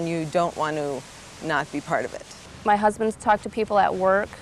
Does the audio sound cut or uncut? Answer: cut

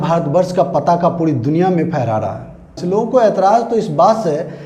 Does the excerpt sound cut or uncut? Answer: cut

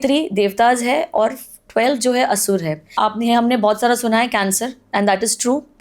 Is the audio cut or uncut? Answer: cut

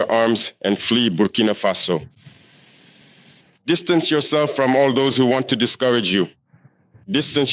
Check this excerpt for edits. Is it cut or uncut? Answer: cut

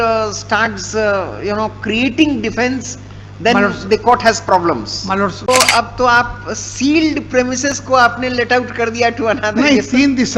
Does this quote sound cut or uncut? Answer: cut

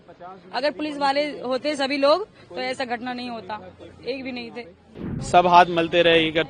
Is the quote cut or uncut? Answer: cut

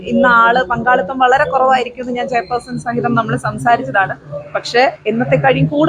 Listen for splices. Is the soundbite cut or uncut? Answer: uncut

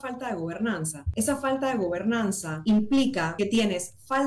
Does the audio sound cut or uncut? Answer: cut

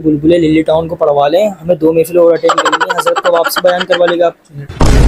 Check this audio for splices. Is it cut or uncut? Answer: uncut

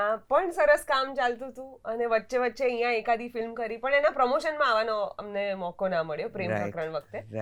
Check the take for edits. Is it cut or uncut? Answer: uncut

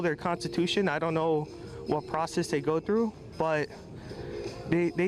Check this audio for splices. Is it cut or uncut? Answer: uncut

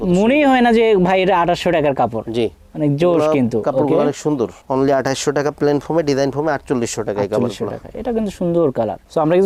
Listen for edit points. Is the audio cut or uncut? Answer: uncut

